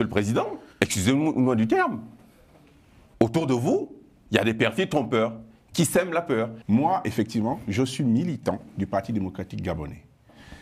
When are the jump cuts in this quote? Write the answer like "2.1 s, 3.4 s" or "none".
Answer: 6.6 s